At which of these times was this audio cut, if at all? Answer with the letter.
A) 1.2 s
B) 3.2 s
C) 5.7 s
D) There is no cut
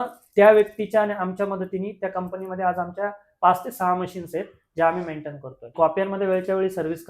C